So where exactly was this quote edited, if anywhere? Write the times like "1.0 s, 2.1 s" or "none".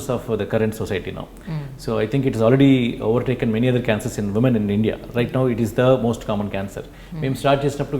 none